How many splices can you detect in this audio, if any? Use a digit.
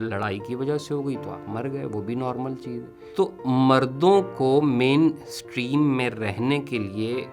1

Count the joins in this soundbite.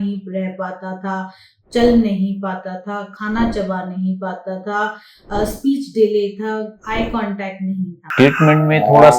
1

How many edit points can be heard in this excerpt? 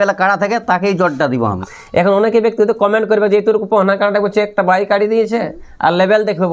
1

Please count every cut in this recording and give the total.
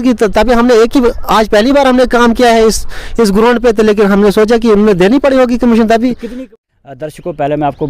1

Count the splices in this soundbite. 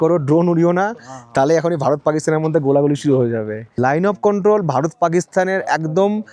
1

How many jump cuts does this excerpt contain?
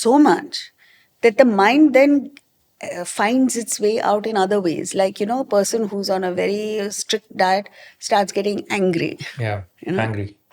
0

